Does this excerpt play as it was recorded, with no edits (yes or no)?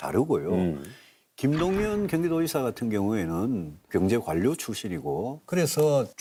yes